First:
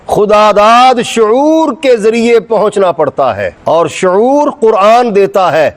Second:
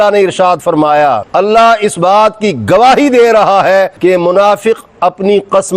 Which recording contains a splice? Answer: second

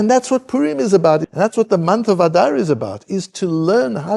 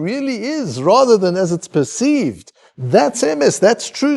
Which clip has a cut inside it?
first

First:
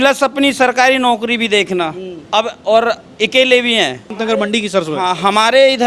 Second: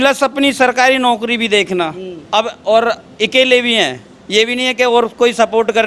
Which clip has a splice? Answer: first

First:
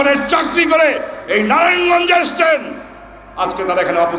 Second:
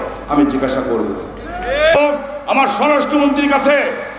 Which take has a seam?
second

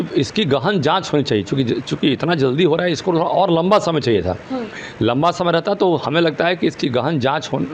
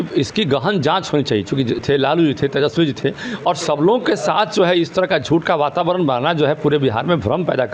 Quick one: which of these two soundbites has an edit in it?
second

